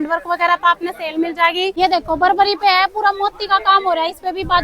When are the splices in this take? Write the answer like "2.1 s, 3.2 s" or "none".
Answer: 1.7 s